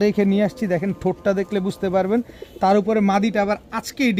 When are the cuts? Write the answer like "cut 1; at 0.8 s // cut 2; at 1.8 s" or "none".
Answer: none